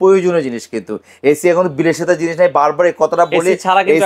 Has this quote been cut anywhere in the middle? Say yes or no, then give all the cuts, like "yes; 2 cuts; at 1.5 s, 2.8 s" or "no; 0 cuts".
no; 0 cuts